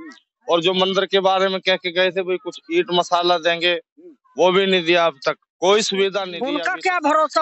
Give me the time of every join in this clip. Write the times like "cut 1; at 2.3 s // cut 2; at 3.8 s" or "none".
cut 1; at 6.4 s